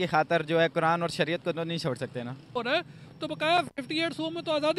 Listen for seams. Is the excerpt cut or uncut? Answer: cut